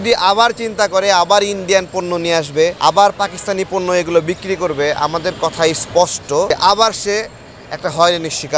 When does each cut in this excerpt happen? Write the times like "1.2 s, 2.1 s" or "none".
2.8 s, 6.5 s